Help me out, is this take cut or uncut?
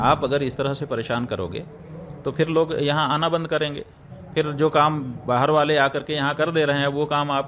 uncut